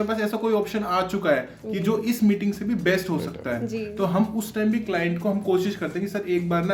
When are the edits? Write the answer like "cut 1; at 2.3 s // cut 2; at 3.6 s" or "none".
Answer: none